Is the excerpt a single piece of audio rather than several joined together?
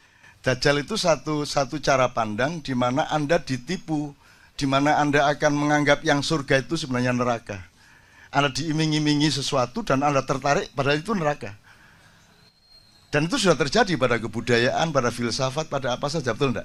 yes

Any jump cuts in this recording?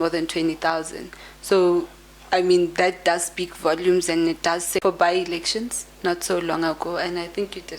yes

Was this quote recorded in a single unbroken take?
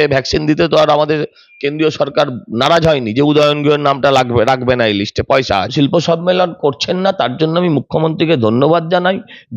no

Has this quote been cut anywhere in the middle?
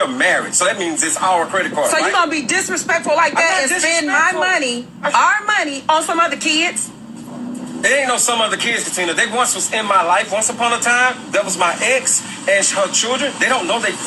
no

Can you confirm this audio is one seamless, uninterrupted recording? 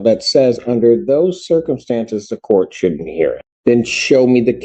no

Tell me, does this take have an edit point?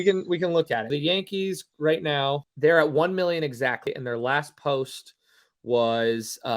yes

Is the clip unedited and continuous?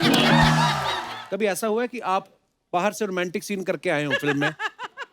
no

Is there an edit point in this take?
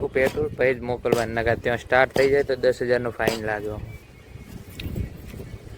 no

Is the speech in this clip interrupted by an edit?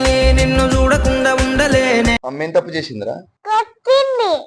yes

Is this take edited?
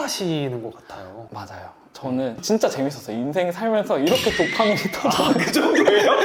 no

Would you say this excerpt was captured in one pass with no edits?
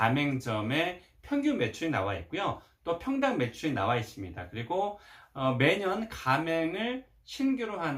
yes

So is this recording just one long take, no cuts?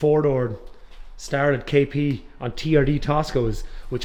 yes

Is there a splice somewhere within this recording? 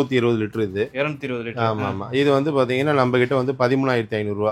no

